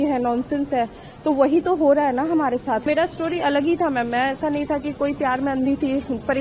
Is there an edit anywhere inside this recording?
yes; 1 cut; at 2.9 s

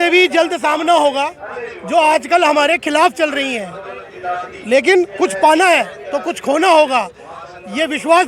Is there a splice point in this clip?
no; 0 cuts

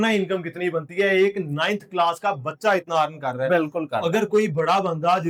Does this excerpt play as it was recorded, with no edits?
yes; 0 cuts

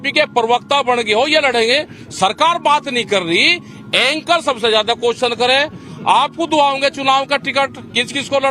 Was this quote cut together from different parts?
no; 0 cuts

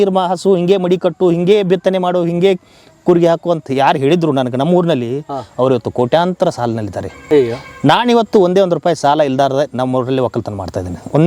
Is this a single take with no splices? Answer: yes; 0 cuts

